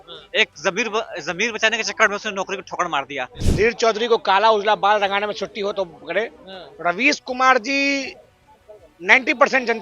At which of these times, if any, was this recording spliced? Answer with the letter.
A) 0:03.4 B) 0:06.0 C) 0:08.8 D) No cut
A